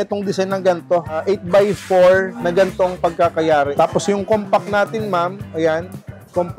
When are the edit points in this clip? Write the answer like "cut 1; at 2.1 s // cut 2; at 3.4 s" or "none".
cut 1; at 1.2 s // cut 2; at 2.4 s // cut 3; at 3.7 s

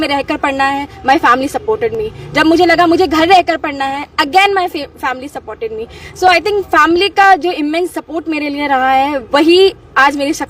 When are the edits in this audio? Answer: none

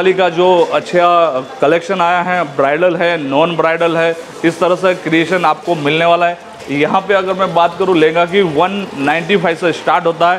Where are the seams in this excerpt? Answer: none

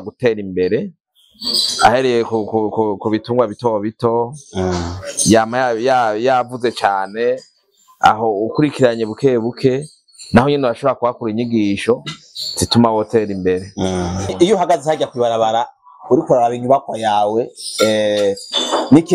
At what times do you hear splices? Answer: cut 1; at 14.3 s

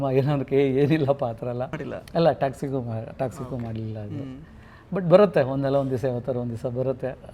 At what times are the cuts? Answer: cut 1; at 1.8 s

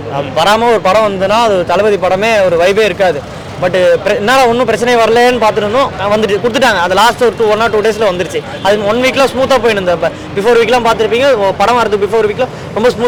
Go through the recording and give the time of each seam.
none

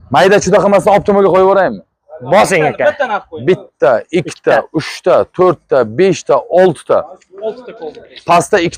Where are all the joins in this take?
none

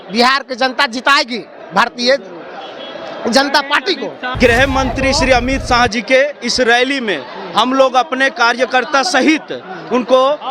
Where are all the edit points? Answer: cut 1; at 4.2 s

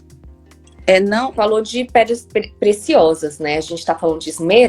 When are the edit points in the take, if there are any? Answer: cut 1; at 1.3 s

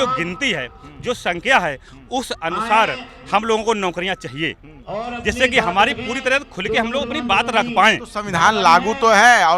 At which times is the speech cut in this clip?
none

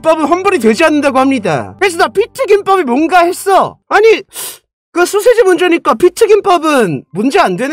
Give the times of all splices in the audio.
cut 1; at 3.8 s

